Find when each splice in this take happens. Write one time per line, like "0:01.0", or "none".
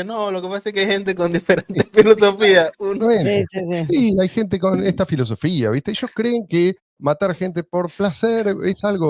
0:06.9